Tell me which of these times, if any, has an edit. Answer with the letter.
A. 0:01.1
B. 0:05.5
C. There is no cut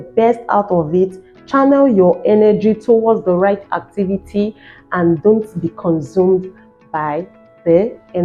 C